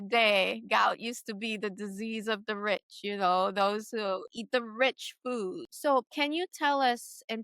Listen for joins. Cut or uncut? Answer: cut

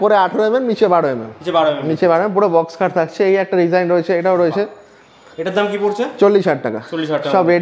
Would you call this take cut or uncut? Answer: uncut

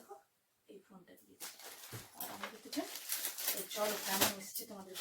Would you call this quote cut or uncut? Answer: cut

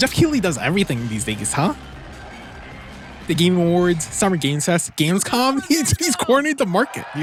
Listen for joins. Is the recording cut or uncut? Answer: uncut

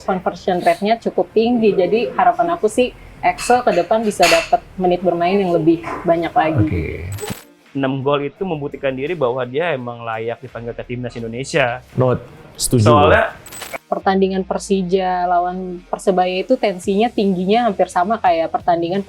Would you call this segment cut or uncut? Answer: cut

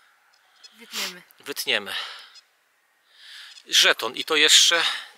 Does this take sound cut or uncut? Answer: uncut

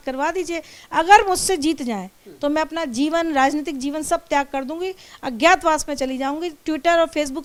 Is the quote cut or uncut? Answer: uncut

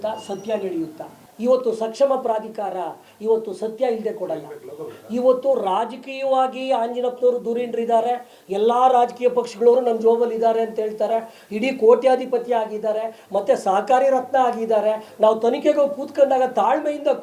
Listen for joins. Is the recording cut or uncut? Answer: cut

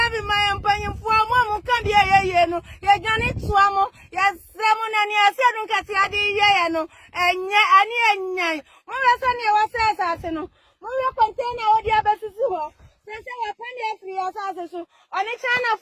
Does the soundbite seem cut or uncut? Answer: uncut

